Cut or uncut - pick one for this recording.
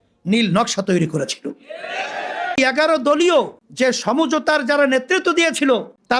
cut